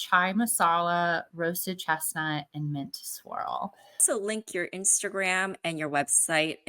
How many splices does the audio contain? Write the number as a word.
one